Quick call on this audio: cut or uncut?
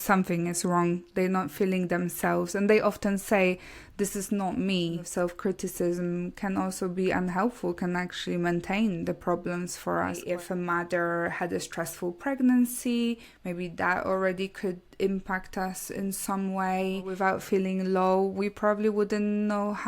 cut